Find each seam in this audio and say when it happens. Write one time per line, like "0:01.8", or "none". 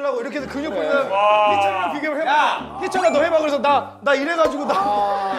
none